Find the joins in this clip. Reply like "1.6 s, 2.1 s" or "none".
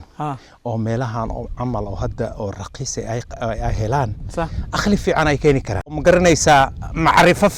6.0 s